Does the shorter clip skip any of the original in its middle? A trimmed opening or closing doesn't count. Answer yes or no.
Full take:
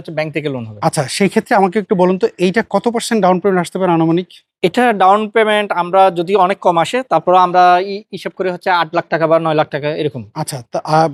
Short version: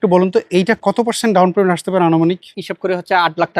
yes